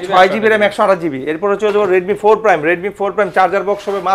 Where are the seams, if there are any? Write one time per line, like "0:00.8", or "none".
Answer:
none